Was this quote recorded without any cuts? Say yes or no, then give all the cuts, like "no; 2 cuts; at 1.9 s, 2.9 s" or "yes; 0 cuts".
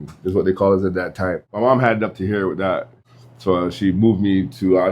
no; 1 cut; at 1.4 s